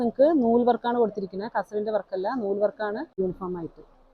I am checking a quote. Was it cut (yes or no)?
yes